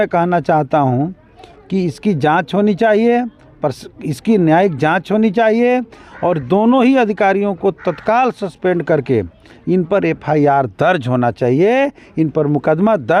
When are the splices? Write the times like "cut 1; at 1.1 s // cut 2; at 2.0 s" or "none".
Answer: none